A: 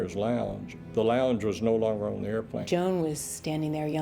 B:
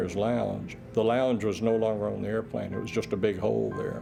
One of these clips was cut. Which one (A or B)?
A